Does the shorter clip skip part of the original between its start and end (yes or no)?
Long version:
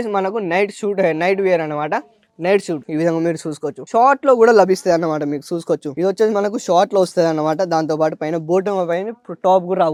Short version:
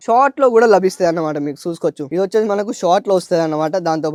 no